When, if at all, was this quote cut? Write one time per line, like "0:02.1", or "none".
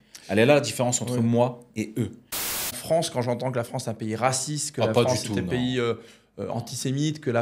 0:02.6